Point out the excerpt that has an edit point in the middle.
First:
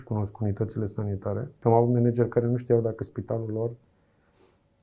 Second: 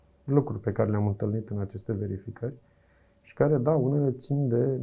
first; 1 cut; at 1.5 s

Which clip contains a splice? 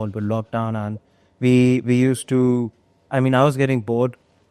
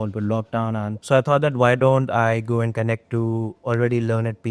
second; 1 cut; at 0.9 s

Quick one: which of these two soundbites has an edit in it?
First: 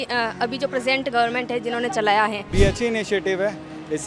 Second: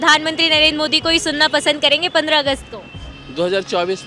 first; 1 cut; at 2.4 s

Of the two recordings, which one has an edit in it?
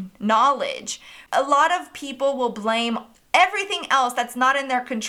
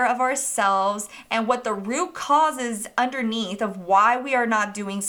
first; 2 cuts; at 1.2 s, 3.1 s

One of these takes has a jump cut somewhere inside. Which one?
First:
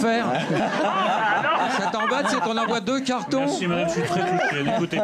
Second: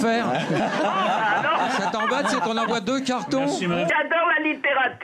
second; 1 cut; at 3.9 s

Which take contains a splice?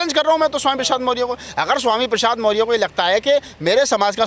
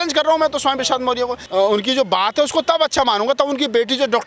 second; 1 cut; at 1.4 s

